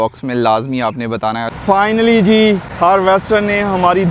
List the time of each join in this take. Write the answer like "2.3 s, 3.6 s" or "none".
1.4 s